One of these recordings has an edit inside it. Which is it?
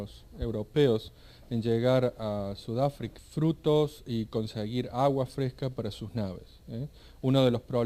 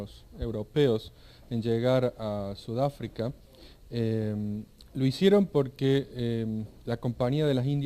second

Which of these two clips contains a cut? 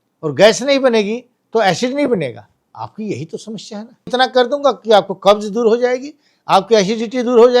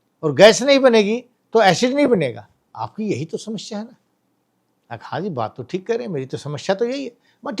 first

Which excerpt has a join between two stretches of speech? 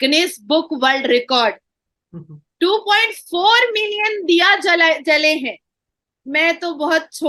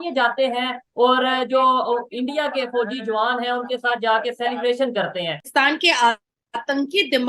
second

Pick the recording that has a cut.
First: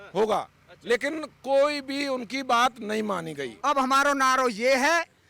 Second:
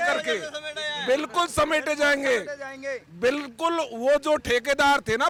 first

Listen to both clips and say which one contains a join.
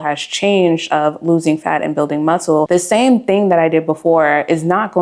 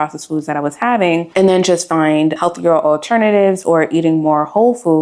second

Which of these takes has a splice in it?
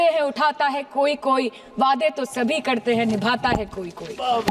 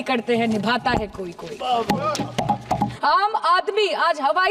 second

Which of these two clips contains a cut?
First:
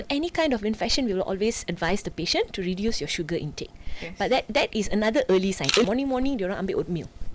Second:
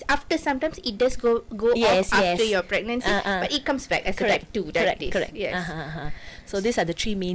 first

